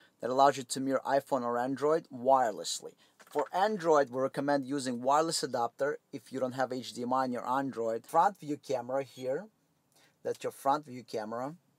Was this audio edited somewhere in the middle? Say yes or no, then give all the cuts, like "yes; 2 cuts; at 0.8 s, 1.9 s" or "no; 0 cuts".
yes; 1 cut; at 8.1 s